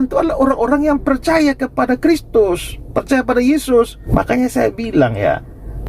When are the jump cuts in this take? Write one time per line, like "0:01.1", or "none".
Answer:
0:04.0

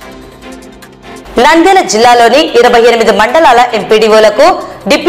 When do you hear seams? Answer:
none

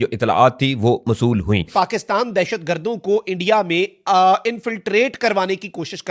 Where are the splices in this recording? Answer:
0:01.7

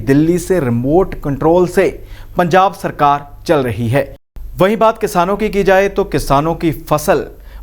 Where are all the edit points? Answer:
none

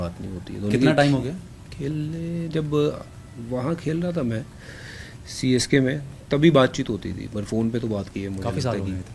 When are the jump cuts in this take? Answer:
none

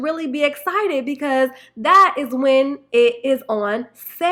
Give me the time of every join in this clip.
none

